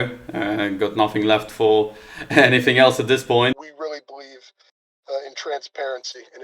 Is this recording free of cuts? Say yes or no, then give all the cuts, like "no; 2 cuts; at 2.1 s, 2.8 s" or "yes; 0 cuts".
no; 1 cut; at 3.6 s